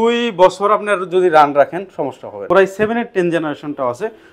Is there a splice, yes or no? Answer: yes